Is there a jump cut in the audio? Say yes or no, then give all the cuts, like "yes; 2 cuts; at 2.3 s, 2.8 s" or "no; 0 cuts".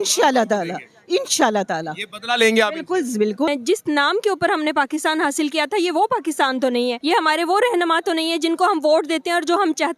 yes; 2 cuts; at 3.5 s, 7.0 s